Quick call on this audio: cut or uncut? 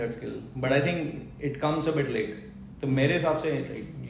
uncut